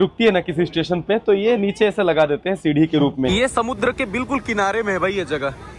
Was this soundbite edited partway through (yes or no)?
yes